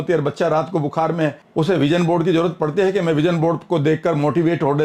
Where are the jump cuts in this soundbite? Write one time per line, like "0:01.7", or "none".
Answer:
0:01.4